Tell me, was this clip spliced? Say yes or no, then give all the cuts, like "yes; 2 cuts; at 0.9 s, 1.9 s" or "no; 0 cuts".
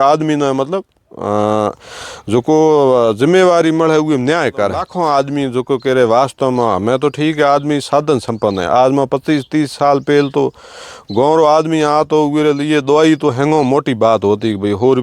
yes; 1 cut; at 4.9 s